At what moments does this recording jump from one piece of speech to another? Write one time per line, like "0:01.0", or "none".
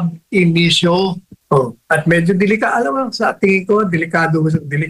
0:01.3